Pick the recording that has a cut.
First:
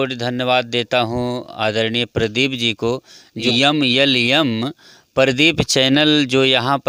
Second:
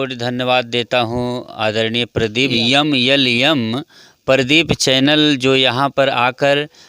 second; 1 cut; at 2.5 s

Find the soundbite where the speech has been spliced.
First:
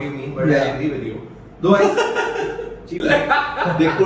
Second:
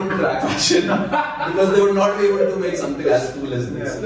first; 1 cut; at 3.0 s

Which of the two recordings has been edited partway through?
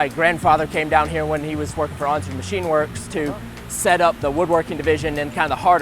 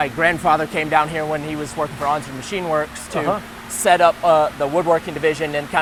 first; 1 cut; at 4.2 s

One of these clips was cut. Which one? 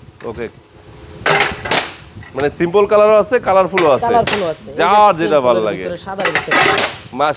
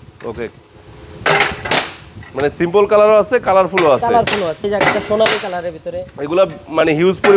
second; 1 cut; at 4.6 s

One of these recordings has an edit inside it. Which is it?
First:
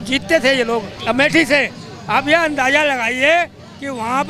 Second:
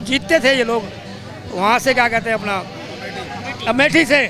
first; 1 cut; at 0.9 s

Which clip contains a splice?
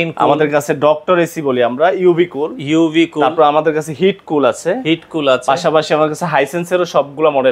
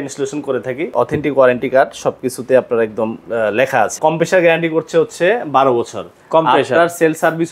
second; 2 cuts; at 0.9 s, 4.0 s

